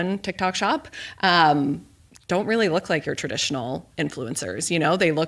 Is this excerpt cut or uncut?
uncut